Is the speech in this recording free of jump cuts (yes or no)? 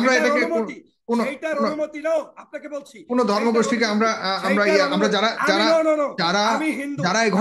yes